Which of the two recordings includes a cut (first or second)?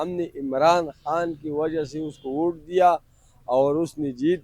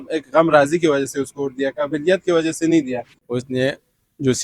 second